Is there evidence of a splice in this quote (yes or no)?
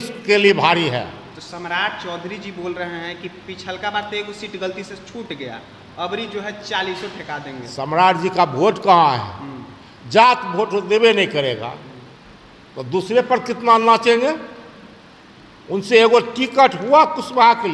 no